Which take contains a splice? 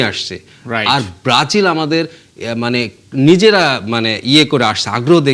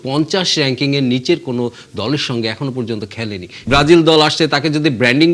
second; 1 cut; at 3.6 s

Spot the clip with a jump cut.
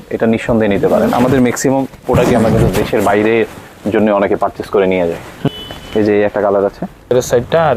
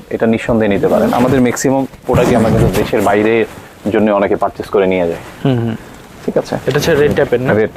first; 2 cuts; at 5.5 s, 7.1 s

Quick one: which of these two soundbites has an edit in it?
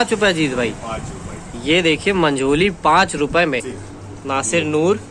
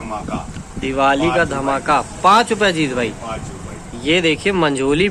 first; 1 cut; at 3.8 s

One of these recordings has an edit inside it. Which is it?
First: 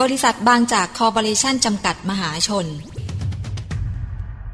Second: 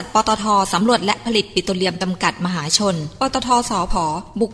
first; 1 cut; at 3.0 s

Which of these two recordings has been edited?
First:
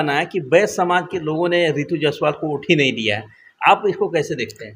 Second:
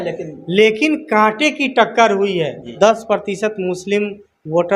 second; 1 cut; at 2.7 s

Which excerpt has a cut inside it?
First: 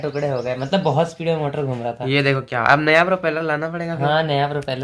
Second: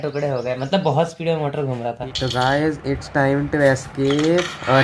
second; 1 cut; at 2.0 s

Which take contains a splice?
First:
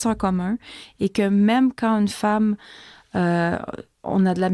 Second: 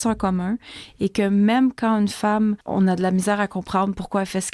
second; 1 cut; at 2.6 s

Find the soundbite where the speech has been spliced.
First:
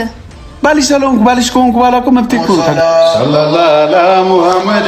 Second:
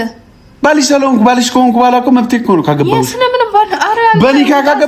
first; 1 cut; at 2.7 s

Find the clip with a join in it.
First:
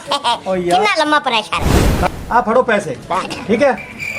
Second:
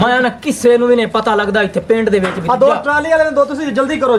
first; 1 cut; at 1.9 s

